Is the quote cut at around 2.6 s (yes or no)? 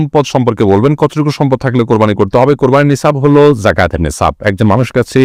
no